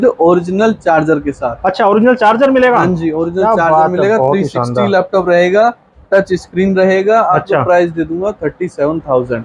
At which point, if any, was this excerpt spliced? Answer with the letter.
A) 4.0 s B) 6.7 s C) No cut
C